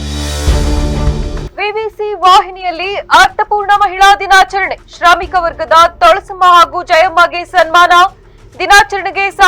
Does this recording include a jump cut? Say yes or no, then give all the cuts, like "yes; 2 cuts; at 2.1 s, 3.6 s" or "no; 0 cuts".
yes; 1 cut; at 1.4 s